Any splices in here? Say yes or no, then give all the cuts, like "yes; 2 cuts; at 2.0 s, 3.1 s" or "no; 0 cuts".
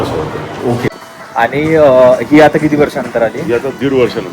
yes; 1 cut; at 1.0 s